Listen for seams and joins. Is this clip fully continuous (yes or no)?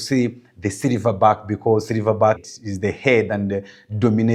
yes